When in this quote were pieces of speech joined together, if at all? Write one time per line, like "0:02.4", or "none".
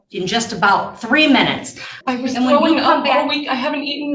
0:01.9